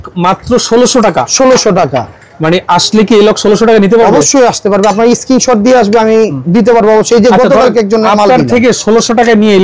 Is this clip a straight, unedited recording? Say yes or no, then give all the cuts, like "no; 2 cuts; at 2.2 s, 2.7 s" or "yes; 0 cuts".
yes; 0 cuts